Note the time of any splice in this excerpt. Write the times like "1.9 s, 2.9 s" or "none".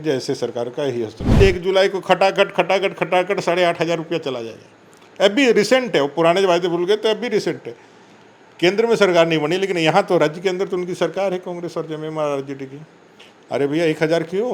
1.4 s